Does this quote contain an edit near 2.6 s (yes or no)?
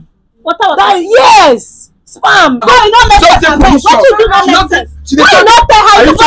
yes